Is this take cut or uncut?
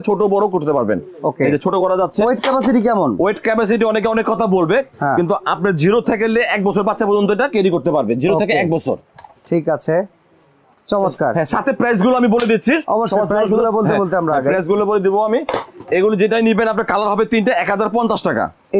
uncut